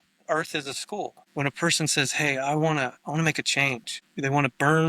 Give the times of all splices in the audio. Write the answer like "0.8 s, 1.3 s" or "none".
1.2 s, 4.0 s